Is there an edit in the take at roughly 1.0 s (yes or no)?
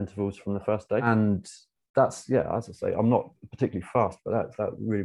yes